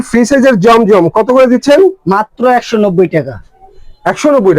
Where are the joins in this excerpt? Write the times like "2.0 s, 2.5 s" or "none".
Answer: none